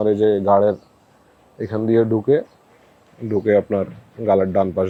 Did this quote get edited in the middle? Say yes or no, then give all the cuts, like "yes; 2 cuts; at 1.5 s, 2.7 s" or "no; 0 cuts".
no; 0 cuts